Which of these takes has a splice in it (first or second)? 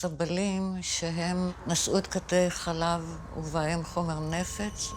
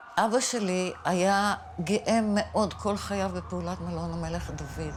first